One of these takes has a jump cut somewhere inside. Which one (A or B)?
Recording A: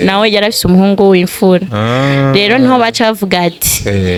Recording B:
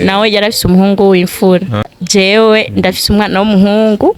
B